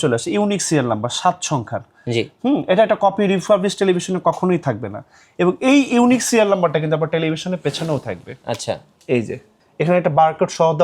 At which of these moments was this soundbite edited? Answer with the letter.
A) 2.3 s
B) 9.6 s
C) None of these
C